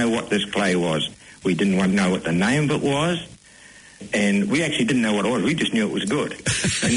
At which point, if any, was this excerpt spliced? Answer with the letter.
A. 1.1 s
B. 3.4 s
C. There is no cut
C